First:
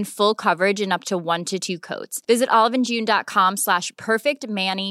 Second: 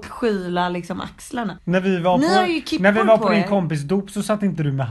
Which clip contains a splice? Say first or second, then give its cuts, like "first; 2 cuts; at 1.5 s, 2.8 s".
second; 1 cut; at 1.6 s